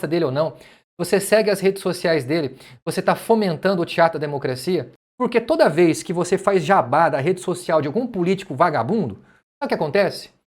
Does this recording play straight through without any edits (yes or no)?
no